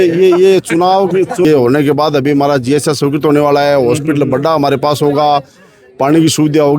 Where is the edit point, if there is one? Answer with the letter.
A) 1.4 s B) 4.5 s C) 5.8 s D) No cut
A